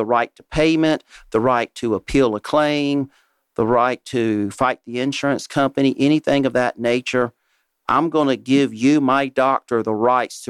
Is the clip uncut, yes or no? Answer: yes